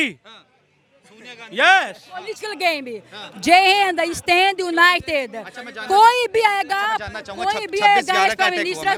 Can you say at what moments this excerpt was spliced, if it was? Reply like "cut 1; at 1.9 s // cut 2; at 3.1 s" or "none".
none